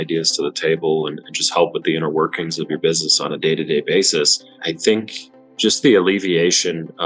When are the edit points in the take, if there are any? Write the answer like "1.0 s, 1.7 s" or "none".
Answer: 4.6 s